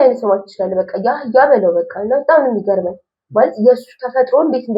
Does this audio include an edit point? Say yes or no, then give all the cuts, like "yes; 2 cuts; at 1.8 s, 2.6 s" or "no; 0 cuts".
no; 0 cuts